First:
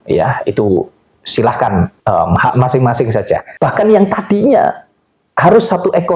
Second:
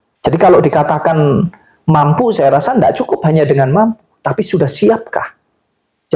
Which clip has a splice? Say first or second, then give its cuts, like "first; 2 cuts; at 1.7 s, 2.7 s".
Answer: first; 2 cuts; at 2.0 s, 3.5 s